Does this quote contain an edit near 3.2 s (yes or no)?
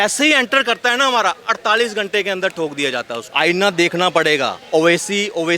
yes